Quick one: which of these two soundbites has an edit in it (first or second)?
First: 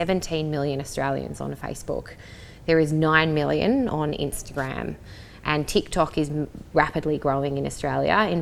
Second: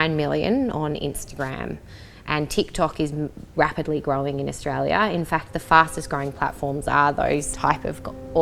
second